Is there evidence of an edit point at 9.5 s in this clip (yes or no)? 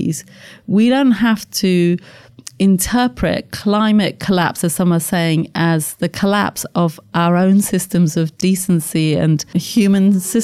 yes